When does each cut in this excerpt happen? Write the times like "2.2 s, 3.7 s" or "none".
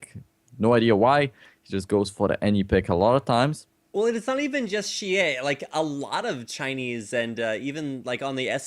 5.6 s